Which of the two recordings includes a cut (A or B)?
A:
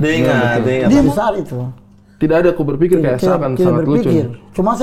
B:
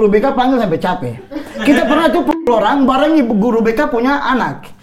A